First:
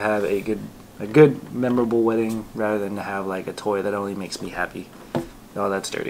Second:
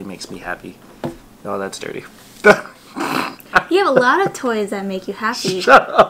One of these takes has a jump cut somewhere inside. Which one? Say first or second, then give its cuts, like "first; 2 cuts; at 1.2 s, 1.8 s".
second; 1 cut; at 3.4 s